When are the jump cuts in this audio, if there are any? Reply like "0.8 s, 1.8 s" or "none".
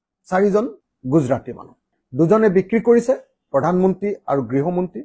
none